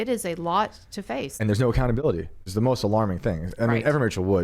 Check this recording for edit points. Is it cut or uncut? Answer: cut